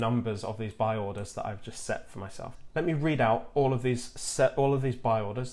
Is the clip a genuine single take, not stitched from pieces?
no; 1 cut; at 2.5 s

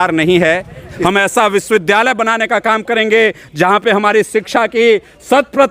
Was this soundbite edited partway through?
yes; 1 cut; at 0.9 s

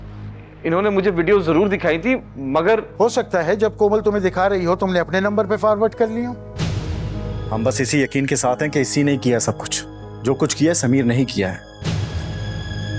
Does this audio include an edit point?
yes; 1 cut; at 7.4 s

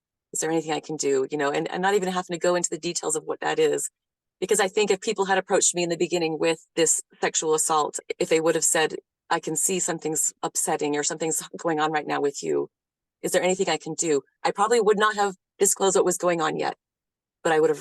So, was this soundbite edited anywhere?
yes; 2 cuts; at 10.3 s, 14.4 s

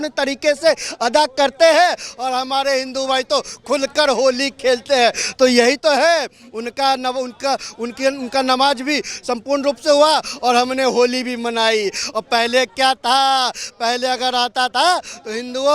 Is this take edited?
no; 0 cuts

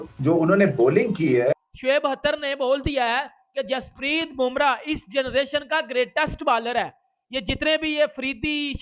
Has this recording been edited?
yes; 1 cut; at 1.5 s

